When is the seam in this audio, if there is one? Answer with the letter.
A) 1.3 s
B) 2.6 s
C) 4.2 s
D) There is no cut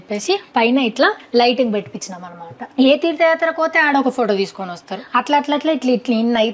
B